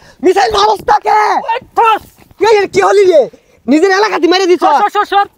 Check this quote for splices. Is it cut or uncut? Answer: uncut